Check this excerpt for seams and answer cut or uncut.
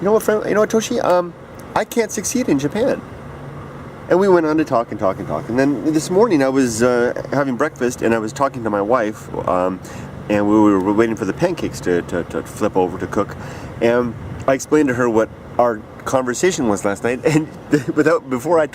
cut